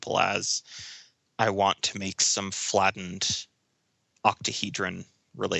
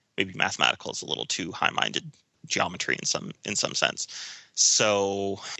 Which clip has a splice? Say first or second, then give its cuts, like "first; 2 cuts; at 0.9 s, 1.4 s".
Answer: second; 1 cut; at 2.4 s